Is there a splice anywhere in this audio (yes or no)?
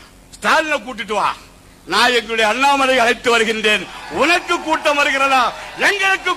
no